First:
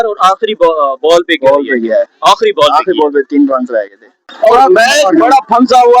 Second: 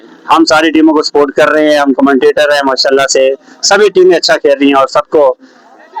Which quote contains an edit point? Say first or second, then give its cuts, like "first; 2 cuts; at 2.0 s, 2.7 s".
first; 1 cut; at 4.3 s